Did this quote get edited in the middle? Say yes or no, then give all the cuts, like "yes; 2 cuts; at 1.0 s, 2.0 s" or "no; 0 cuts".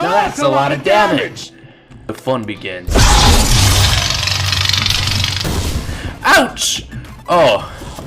yes; 1 cut; at 5.5 s